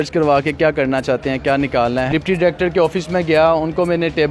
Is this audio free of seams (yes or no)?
no